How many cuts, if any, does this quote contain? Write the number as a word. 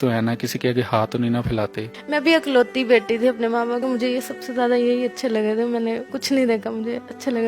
three